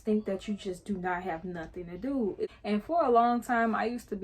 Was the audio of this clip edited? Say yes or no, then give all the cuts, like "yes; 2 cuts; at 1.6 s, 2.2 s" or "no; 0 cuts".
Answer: yes; 1 cut; at 2.5 s